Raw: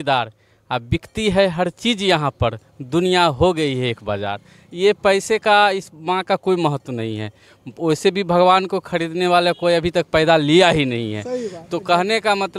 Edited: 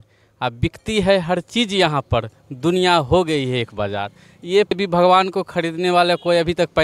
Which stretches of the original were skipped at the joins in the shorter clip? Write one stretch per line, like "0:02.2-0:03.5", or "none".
0:05.0-0:08.1